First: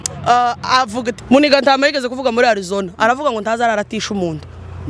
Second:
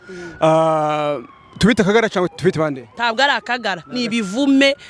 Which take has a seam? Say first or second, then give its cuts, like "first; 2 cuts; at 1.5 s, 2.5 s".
first; 1 cut; at 1.1 s